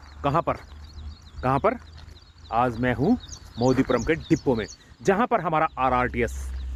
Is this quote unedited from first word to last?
yes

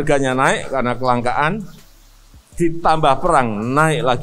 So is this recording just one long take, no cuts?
yes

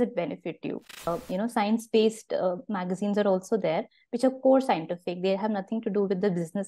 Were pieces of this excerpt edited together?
yes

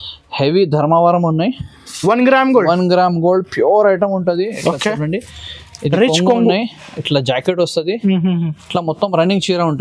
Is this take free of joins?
yes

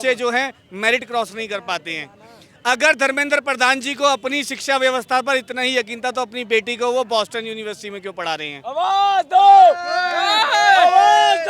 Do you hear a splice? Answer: no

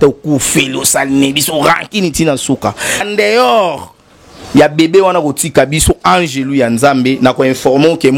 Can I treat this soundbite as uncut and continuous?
no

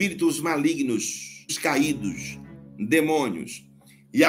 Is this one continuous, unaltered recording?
no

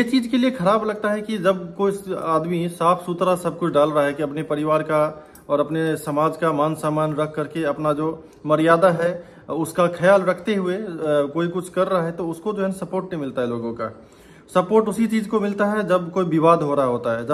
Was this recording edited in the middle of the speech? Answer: no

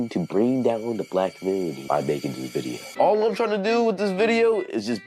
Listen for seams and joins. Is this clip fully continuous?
no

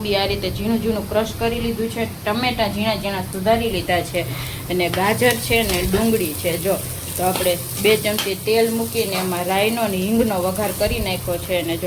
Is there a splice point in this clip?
no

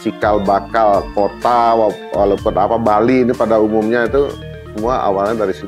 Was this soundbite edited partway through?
no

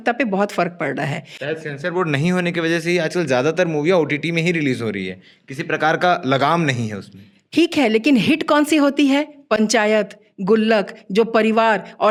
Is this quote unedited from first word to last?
yes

